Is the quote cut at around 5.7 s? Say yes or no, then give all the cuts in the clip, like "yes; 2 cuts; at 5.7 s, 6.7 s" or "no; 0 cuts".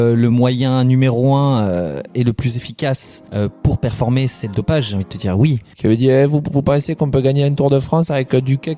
yes; 1 cut; at 5.7 s